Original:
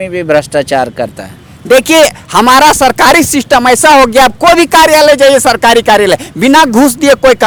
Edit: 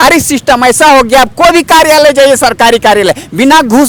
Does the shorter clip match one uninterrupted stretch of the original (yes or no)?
yes